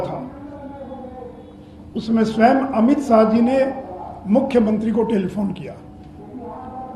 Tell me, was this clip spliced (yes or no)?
no